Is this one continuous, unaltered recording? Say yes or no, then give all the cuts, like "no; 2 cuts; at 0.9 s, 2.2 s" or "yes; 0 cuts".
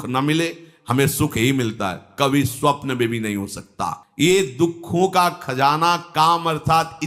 yes; 0 cuts